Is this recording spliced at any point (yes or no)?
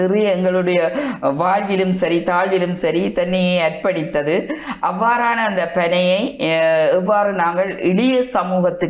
no